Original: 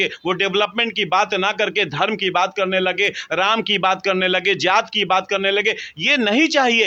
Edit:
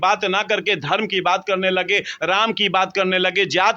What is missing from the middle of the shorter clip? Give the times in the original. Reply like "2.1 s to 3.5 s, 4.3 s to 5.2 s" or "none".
none